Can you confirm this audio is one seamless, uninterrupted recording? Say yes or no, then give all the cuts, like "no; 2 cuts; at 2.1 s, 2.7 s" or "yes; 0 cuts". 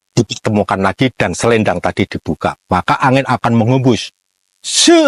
yes; 0 cuts